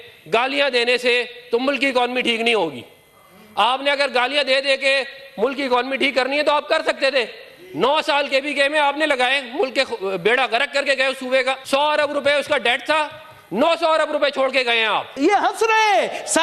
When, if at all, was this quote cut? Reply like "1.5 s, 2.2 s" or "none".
11.6 s, 15.1 s